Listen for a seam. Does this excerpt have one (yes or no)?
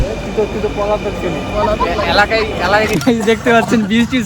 yes